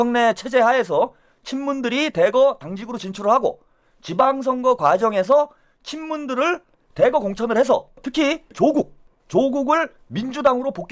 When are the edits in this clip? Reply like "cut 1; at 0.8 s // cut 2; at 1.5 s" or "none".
cut 1; at 8.5 s